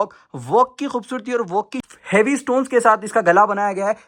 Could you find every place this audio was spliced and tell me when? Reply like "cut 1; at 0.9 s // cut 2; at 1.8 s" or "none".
cut 1; at 1.8 s